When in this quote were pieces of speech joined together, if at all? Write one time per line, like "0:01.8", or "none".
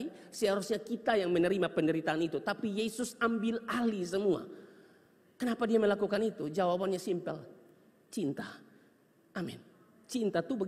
none